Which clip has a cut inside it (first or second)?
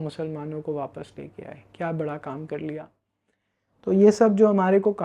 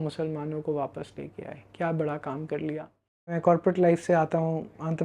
second